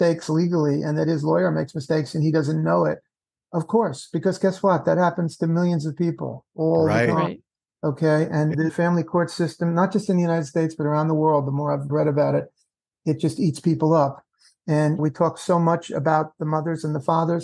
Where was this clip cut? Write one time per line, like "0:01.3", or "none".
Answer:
0:08.5
0:11.9
0:15.0